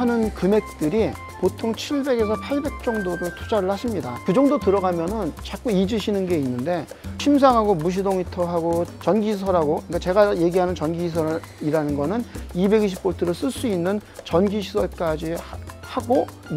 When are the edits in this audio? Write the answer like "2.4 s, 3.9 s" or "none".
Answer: none